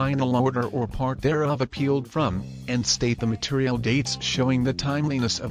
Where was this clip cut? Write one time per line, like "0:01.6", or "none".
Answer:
0:02.5
0:04.6